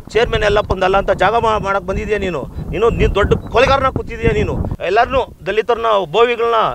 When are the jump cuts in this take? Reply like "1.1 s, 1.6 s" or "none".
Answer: 4.7 s